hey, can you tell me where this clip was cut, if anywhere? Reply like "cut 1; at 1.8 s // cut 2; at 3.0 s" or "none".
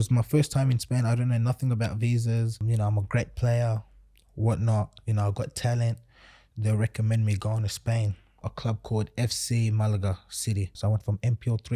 cut 1; at 2.7 s // cut 2; at 8.5 s // cut 3; at 10.8 s